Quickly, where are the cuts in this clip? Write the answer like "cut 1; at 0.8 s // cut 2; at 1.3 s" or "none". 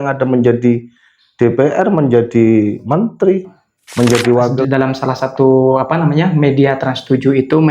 cut 1; at 4.6 s